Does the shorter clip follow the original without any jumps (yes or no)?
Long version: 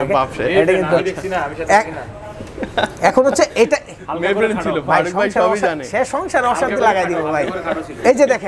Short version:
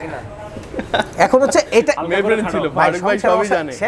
no